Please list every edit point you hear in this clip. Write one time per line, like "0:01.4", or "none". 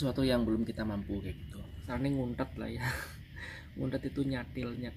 0:01.8